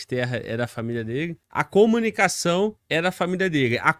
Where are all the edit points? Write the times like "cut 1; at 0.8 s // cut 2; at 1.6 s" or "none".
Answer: cut 1; at 1.7 s // cut 2; at 2.8 s